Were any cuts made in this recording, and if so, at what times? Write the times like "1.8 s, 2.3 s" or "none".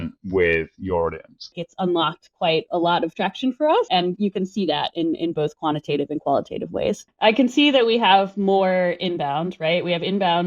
1.6 s, 3.9 s, 7.1 s

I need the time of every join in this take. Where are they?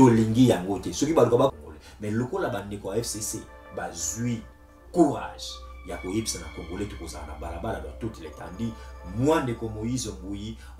1.5 s

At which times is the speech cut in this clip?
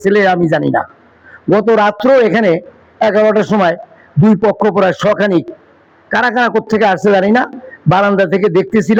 none

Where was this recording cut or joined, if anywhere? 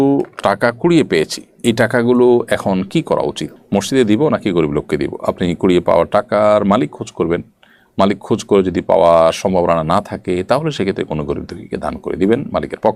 none

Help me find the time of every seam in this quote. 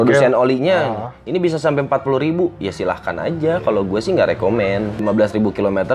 5.0 s

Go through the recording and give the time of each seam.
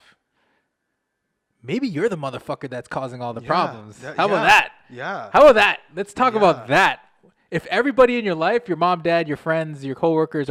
none

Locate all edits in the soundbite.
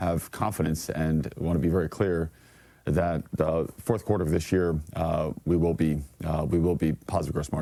none

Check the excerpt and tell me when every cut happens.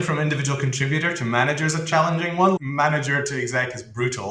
2.6 s

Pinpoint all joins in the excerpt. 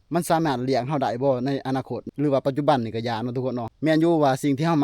2.0 s, 3.7 s

